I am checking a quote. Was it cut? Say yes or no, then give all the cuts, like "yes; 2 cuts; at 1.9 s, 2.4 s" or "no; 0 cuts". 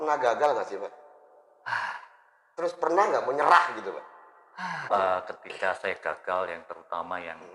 yes; 1 cut; at 4.8 s